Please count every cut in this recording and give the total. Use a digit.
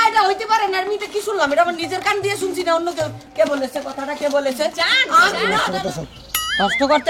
1